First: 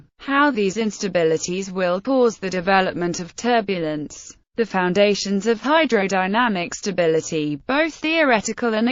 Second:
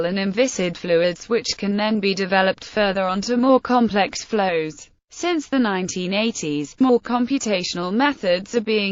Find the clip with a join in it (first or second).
second